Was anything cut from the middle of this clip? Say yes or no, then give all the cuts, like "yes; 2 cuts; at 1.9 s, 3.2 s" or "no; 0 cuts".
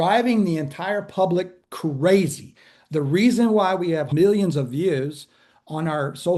yes; 1 cut; at 4.1 s